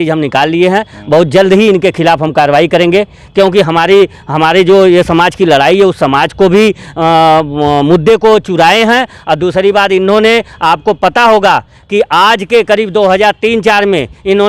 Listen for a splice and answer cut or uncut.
uncut